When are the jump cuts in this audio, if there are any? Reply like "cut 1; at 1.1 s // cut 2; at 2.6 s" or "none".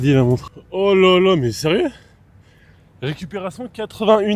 none